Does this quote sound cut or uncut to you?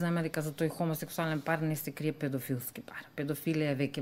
uncut